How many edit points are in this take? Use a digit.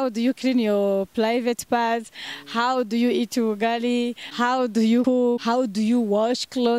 2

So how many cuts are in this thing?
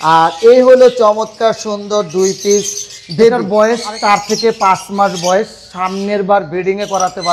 1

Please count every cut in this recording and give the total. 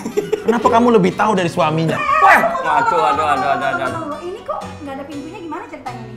1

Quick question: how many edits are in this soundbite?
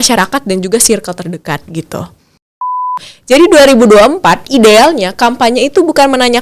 1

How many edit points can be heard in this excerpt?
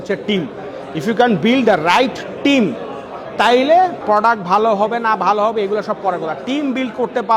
1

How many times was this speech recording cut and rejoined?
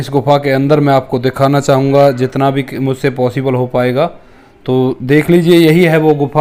0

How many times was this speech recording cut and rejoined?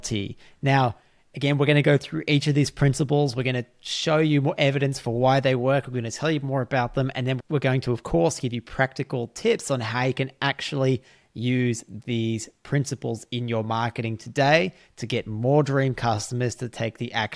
1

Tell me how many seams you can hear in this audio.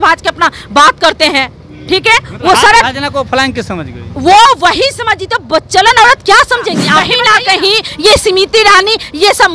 1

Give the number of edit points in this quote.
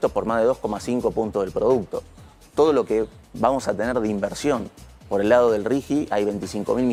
0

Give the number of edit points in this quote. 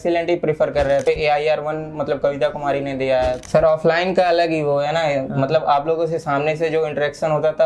2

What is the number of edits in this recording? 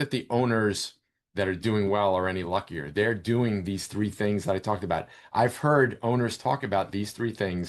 0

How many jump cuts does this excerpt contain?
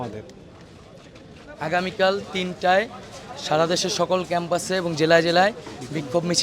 1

